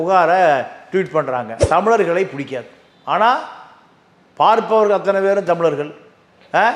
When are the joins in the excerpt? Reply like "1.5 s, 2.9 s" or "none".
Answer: 1.5 s